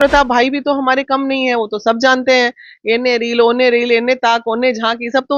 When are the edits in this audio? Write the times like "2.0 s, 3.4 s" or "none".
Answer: none